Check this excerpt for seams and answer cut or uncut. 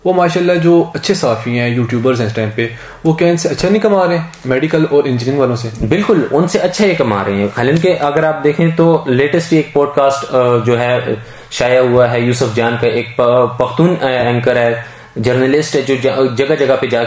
uncut